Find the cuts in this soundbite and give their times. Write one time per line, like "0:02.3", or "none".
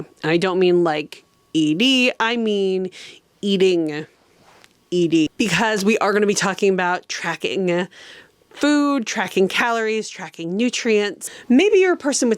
0:11.2